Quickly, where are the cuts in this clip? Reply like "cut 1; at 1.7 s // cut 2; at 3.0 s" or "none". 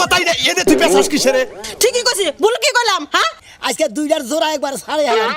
cut 1; at 3.4 s